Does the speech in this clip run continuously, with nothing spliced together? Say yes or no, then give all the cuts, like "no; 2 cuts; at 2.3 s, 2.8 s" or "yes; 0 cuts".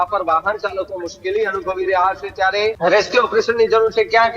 no; 1 cut; at 2.8 s